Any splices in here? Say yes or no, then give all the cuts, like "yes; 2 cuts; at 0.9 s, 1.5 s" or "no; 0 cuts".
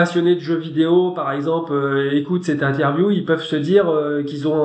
no; 0 cuts